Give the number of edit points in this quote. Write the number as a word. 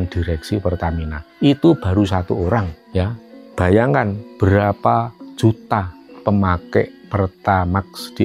zero